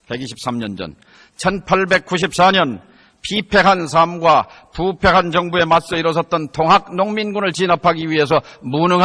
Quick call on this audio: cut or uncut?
cut